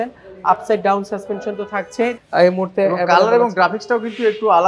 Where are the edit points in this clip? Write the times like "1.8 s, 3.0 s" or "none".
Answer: 2.2 s